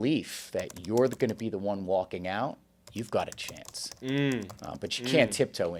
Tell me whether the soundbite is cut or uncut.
uncut